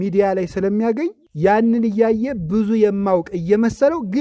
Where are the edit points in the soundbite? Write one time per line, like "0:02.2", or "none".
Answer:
0:01.2